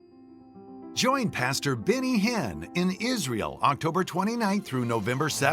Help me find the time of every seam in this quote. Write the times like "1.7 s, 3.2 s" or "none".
1.0 s